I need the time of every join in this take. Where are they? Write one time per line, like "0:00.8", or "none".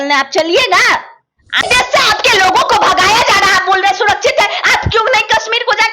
0:01.6